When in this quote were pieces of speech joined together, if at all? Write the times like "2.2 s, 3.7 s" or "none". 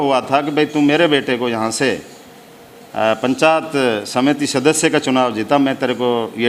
none